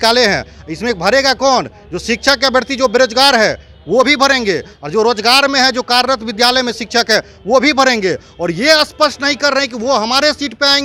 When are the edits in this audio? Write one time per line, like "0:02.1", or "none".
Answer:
none